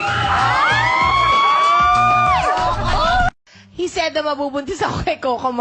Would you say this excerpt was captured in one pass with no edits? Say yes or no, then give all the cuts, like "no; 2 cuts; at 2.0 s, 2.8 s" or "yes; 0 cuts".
yes; 0 cuts